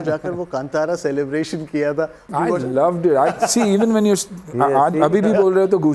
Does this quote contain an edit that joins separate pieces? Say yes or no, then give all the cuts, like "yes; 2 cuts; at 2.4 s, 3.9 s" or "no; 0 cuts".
yes; 1 cut; at 2.3 s